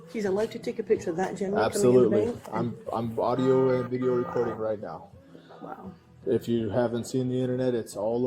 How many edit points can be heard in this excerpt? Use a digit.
0